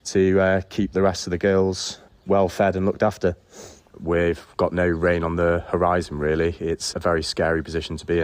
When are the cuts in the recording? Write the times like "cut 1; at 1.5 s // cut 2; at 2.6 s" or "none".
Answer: cut 1; at 3.8 s // cut 2; at 6.9 s